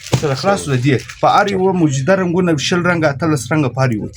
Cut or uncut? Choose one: uncut